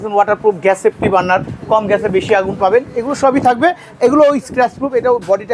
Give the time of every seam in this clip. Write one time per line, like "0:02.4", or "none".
none